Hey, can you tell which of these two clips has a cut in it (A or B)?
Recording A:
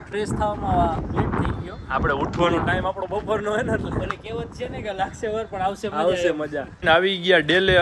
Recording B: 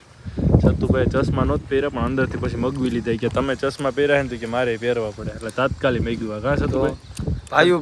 A